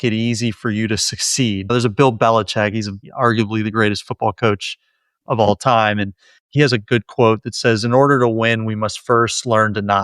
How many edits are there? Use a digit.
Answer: 1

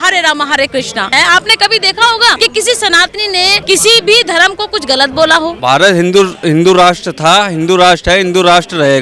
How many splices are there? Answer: 4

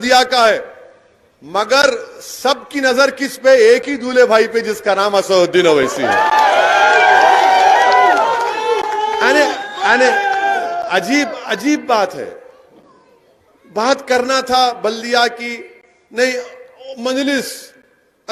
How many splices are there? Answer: 0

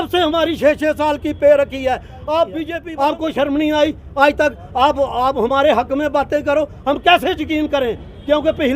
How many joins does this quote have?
1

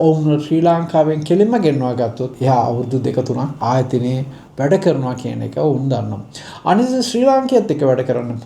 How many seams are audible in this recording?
2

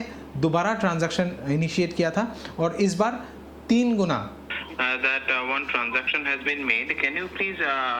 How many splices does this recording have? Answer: 1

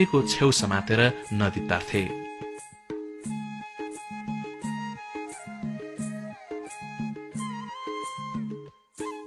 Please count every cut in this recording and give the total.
0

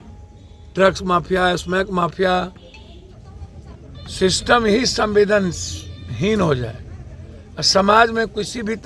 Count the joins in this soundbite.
1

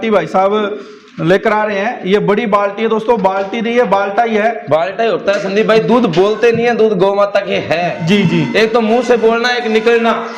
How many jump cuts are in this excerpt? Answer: 0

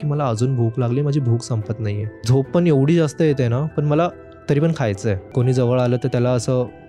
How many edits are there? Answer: 2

